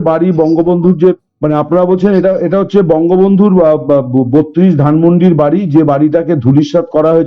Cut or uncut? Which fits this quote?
cut